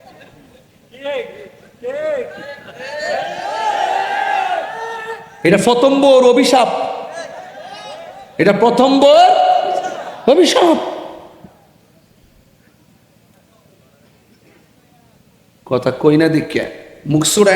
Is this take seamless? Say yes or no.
yes